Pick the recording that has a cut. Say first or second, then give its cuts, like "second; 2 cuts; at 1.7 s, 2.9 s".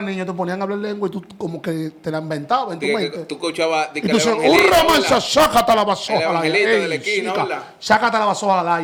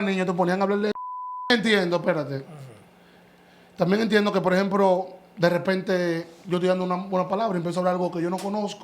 second; 1 cut; at 1.5 s